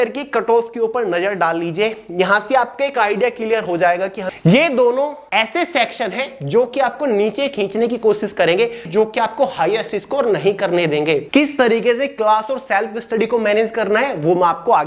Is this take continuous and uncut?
no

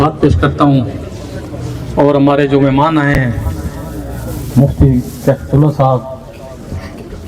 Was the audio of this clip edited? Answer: no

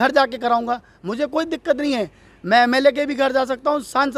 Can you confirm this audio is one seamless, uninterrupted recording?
yes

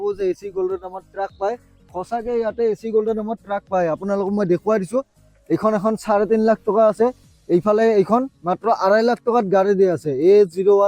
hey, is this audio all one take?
yes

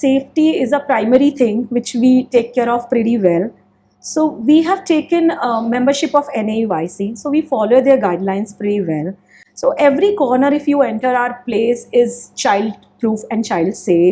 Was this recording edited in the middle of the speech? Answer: no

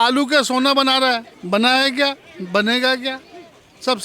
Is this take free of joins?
no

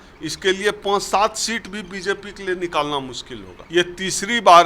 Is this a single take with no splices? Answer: no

